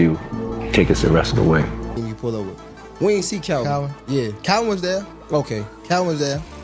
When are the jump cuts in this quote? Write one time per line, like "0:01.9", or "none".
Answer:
0:02.0